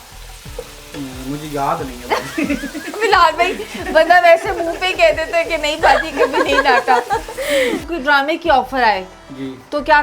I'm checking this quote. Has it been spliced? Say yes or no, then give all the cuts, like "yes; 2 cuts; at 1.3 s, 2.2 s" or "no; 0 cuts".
yes; 1 cut; at 7.8 s